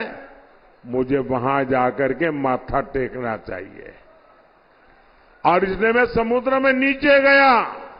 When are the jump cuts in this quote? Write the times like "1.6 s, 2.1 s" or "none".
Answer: none

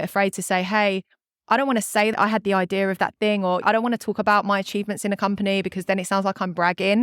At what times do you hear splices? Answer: 2.1 s

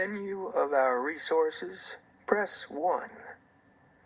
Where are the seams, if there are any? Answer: 1.1 s

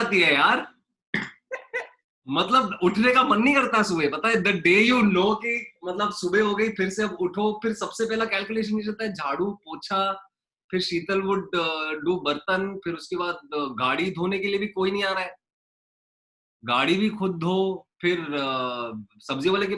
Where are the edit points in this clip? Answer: none

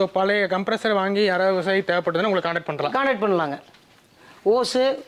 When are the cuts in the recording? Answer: none

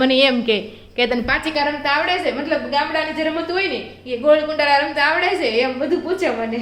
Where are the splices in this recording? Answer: none

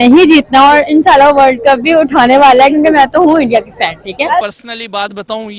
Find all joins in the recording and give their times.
4.4 s

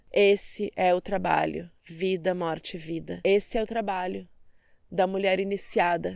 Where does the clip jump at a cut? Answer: none

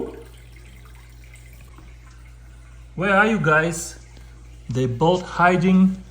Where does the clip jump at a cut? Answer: 1.7 s

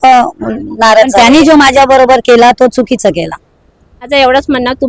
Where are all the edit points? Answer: 1.1 s, 4.1 s

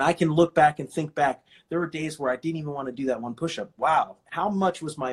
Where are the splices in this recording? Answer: 4.2 s

